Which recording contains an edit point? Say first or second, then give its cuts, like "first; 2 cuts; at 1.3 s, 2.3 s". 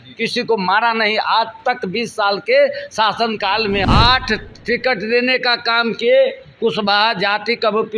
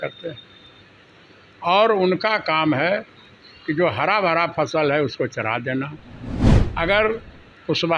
first; 1 cut; at 3.8 s